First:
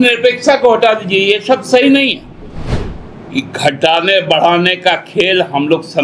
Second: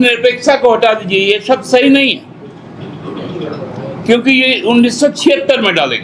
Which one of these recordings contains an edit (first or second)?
first